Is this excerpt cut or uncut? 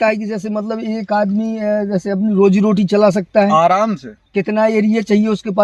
uncut